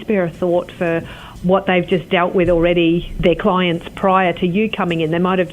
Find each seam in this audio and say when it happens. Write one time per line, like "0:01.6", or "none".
0:01.3
0:03.1